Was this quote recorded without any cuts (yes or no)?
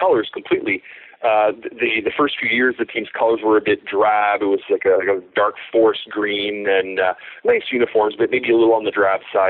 yes